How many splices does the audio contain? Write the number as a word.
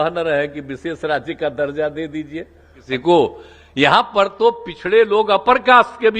one